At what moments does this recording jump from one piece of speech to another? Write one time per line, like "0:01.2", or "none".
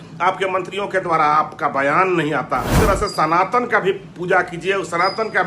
0:02.7